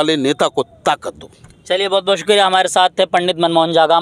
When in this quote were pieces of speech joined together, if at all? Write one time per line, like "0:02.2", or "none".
none